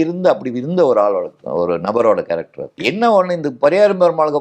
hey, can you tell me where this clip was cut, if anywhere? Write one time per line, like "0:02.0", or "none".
0:02.8